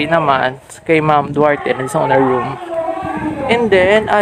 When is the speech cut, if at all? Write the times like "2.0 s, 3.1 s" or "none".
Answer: 3.3 s